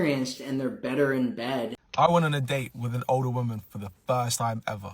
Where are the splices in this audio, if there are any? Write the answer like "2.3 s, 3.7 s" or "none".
1.8 s